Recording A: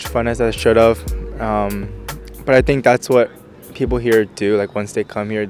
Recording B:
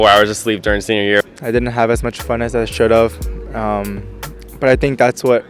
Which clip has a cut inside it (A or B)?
B